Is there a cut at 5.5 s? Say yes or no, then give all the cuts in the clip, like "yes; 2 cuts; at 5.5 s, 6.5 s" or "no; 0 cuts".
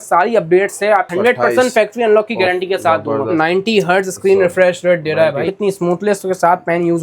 yes; 3 cuts; at 1.1 s, 3.4 s, 5.5 s